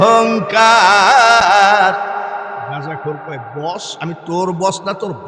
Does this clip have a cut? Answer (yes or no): no